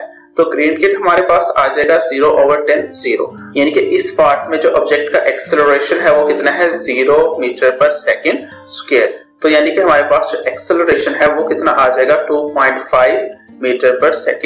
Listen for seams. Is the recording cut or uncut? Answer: cut